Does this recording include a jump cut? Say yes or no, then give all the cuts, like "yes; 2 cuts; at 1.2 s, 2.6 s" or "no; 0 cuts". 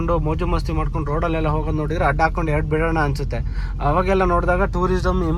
no; 0 cuts